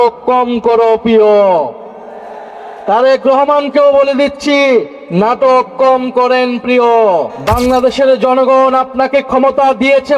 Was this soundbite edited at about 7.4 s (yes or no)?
yes